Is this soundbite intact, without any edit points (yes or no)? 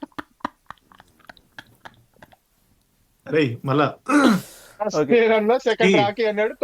yes